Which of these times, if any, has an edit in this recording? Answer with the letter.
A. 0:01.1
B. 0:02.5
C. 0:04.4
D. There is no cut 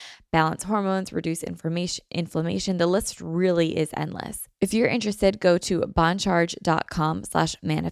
C